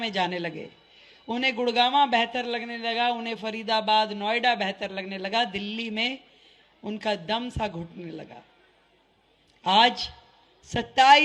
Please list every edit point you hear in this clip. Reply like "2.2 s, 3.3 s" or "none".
none

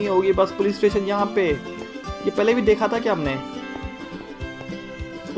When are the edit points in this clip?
none

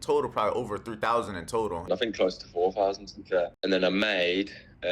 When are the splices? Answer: 1.8 s, 3.6 s

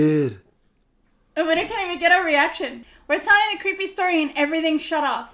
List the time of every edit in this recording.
2.9 s

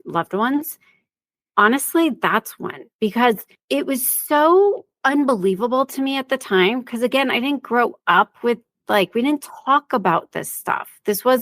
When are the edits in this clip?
3.5 s, 4.9 s

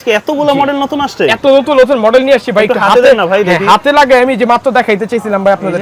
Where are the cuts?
none

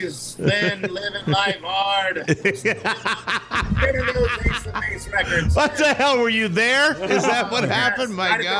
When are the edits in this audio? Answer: none

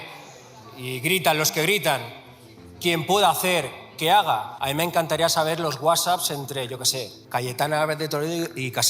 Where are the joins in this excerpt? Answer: 4.6 s, 7.1 s

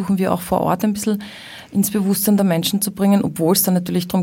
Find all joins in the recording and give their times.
none

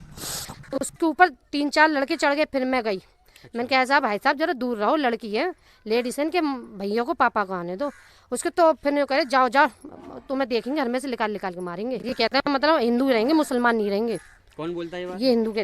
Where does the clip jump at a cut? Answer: 0.9 s, 12.5 s

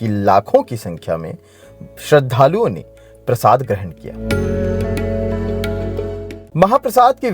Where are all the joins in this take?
6.3 s

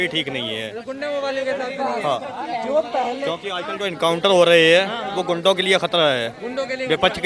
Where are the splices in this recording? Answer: none

